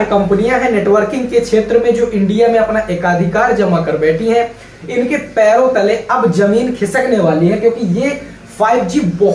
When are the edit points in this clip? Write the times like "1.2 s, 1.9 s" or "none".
none